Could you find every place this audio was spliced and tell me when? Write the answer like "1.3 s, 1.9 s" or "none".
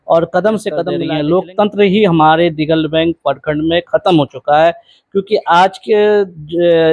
1.0 s